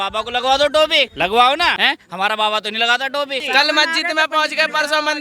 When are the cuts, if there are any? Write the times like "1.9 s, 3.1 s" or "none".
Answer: 1.1 s, 1.8 s, 3.4 s

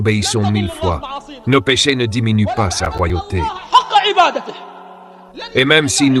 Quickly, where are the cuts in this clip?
none

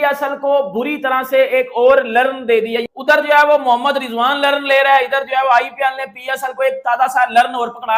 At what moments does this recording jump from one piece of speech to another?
none

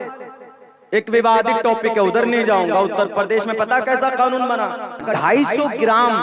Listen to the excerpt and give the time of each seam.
5.0 s

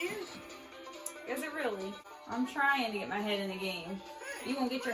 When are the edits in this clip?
2.1 s

